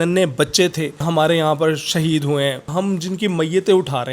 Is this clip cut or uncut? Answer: cut